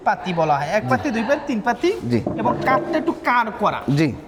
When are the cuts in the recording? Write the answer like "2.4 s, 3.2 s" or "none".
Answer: none